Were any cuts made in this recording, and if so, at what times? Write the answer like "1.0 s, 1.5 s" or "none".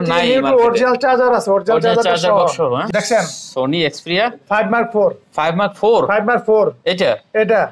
2.8 s